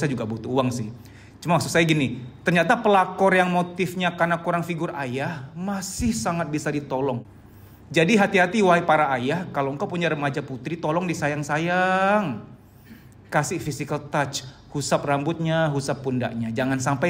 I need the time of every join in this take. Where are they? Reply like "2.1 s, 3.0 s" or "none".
7.3 s